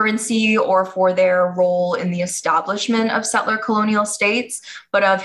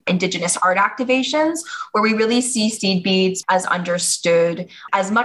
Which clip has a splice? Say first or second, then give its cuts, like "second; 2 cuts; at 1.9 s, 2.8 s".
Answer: second; 1 cut; at 3.4 s